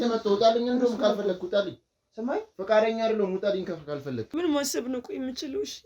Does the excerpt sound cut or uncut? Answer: cut